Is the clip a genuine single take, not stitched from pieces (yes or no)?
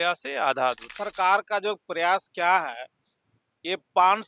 no